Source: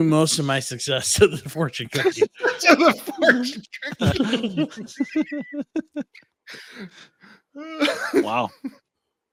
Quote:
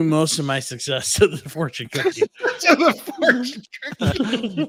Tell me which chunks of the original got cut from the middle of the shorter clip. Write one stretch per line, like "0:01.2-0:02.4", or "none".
none